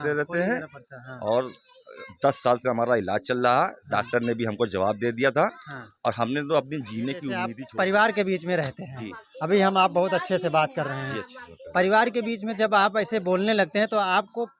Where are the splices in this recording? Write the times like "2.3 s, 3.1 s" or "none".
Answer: 7.6 s